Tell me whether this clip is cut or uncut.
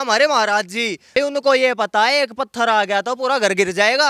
cut